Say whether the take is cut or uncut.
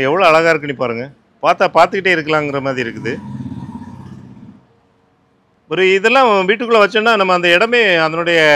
uncut